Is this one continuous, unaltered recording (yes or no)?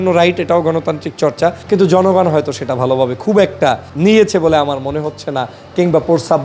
no